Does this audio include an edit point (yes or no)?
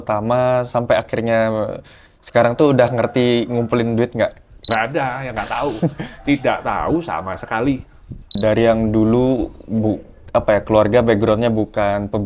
yes